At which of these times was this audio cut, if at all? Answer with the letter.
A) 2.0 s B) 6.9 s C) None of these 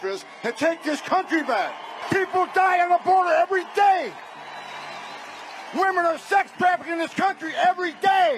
A